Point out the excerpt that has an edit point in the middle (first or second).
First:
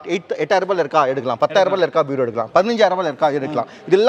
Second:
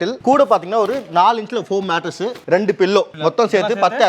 second